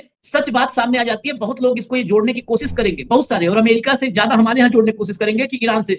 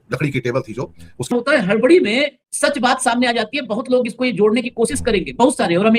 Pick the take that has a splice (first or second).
second